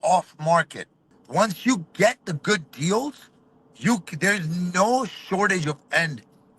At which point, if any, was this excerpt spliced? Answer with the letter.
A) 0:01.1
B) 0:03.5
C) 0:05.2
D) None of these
A